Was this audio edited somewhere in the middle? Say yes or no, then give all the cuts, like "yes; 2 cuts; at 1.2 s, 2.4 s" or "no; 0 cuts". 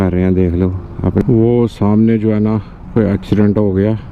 yes; 1 cut; at 1.2 s